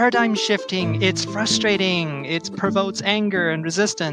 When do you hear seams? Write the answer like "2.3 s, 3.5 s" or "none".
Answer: 0.9 s

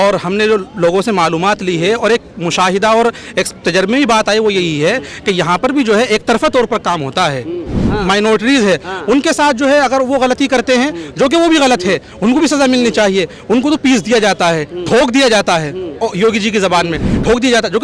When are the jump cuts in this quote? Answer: 7.8 s, 13.8 s

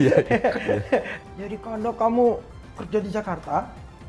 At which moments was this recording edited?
1.1 s

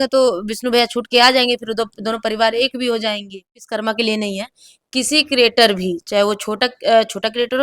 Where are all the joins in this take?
3.7 s

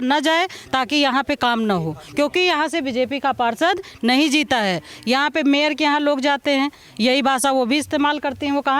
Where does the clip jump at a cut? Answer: none

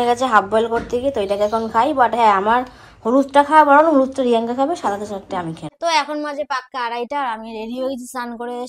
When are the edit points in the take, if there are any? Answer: 5.7 s

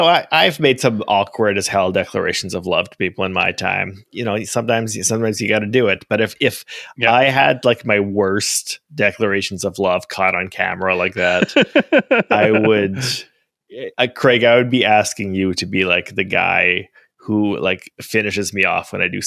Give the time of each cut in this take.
none

